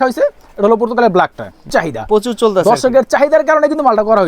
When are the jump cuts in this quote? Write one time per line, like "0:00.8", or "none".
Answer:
0:01.7

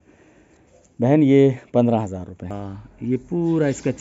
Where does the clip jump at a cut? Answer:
0:02.6

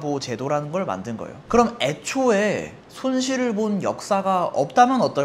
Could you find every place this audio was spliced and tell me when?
0:01.3

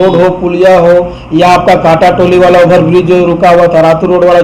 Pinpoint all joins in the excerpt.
none

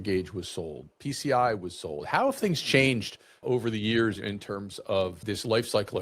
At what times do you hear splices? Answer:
0:03.4

